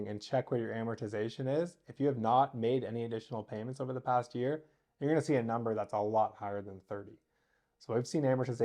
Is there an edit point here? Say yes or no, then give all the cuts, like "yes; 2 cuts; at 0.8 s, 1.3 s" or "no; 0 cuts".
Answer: no; 0 cuts